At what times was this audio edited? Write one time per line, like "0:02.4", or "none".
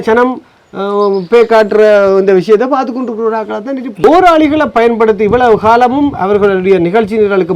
0:04.0

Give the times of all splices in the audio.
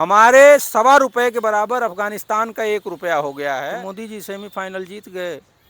0:03.7

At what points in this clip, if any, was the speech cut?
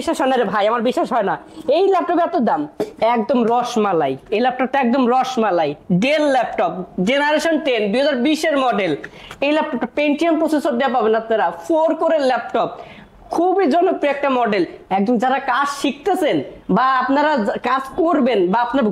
none

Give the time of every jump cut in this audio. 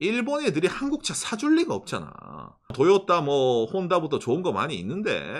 0:02.7

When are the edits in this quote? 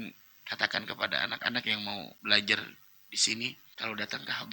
0:02.1
0:03.7

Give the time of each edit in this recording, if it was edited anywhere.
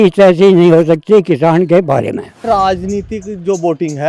0:02.4

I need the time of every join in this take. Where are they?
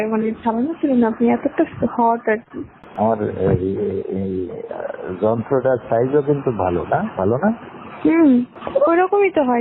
0:02.7

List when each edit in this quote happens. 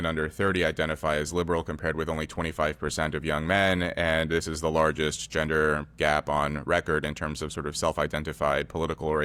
none

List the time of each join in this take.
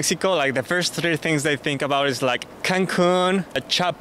0:02.5

